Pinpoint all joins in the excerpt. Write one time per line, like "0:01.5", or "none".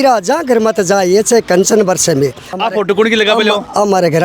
0:02.4